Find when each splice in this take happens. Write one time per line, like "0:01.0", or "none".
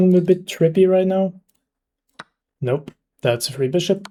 none